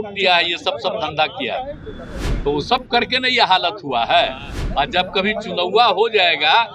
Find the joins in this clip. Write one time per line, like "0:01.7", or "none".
none